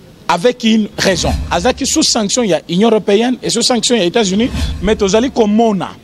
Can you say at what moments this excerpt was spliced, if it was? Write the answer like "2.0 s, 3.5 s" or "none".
1.4 s, 4.7 s